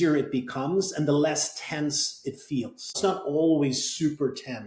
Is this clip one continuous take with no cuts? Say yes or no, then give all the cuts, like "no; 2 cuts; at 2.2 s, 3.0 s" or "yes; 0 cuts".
no; 1 cut; at 2.9 s